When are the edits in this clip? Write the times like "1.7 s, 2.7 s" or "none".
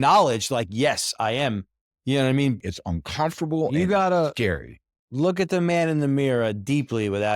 2.6 s